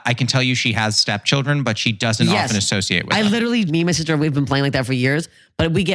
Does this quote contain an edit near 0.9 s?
no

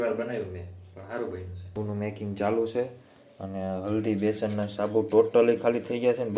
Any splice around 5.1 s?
no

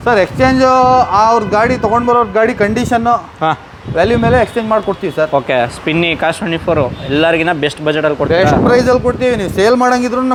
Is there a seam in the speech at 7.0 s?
no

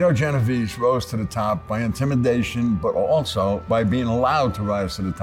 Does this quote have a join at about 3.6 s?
yes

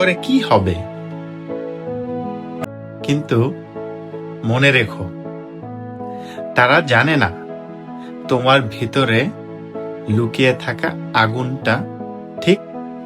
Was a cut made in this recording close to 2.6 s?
yes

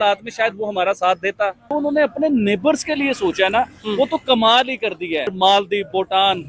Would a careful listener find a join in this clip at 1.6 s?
yes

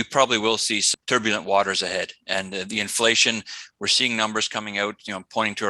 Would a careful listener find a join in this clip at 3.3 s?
no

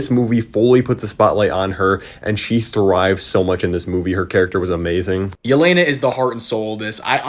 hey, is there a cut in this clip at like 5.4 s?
yes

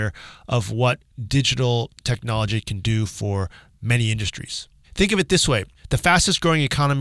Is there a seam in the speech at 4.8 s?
yes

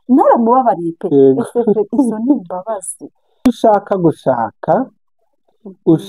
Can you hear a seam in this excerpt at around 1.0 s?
no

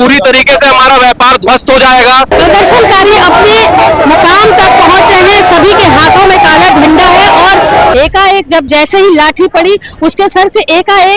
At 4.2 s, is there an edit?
no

